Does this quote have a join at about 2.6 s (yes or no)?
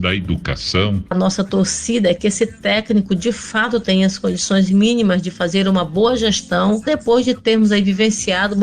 no